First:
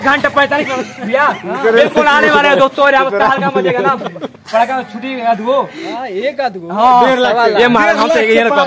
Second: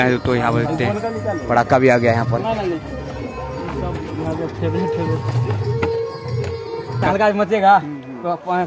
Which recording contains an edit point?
second; 1 cut; at 7.0 s

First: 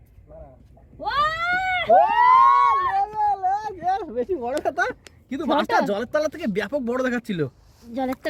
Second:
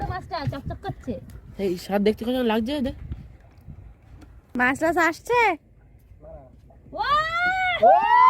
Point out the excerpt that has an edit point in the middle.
second; 1 cut; at 4.5 s

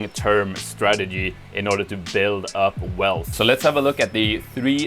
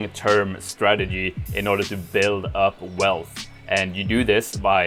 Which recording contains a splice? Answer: first; 1 cut; at 3.3 s

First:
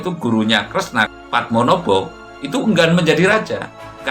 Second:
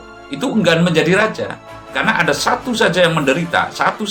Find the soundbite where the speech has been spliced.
first; 1 cut; at 1.1 s

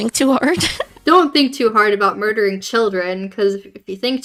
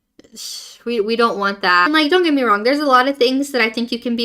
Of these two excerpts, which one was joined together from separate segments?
second; 1 cut; at 1.9 s

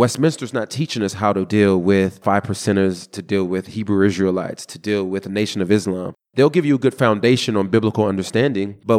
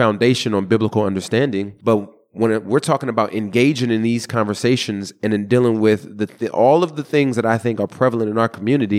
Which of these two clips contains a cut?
first; 1 cut; at 2.2 s

